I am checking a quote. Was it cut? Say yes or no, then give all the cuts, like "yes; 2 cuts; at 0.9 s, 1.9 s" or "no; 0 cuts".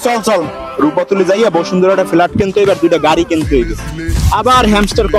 no; 0 cuts